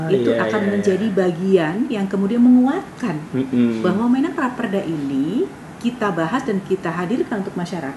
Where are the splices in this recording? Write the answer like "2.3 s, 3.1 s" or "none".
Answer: none